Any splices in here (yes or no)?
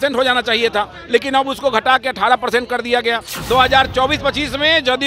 yes